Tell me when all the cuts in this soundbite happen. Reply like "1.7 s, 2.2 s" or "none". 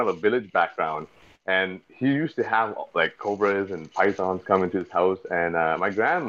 none